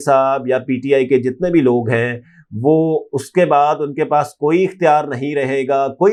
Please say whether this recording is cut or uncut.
uncut